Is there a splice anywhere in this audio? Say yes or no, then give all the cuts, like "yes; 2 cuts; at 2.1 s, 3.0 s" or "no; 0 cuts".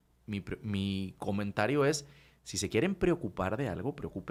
no; 0 cuts